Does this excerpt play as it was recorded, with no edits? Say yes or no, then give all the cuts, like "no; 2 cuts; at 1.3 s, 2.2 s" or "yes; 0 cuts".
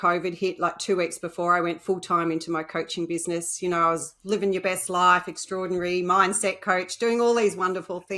yes; 0 cuts